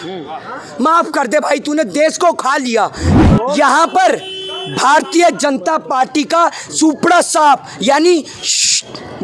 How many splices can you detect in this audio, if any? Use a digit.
1